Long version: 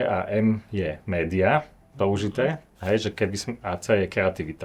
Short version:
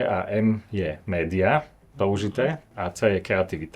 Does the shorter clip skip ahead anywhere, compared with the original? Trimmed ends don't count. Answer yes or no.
yes